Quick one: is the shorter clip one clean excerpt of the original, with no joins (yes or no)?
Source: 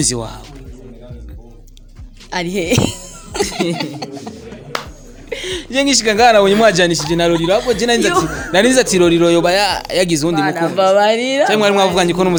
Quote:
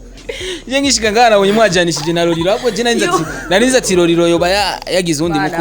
yes